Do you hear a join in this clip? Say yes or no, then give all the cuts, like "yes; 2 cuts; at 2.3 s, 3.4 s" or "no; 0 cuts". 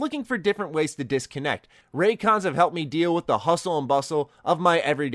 yes; 1 cut; at 1.8 s